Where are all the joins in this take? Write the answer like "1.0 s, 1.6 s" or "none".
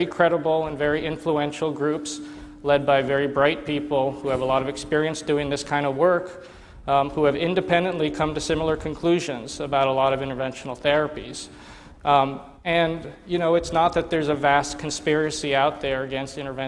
none